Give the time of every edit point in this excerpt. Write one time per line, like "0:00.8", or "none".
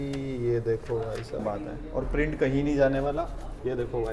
0:01.4